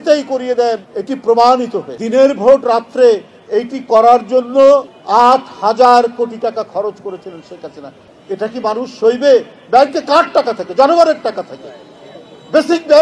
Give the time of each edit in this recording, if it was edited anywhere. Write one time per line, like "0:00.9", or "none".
0:00.9
0:01.9
0:05.0
0:08.0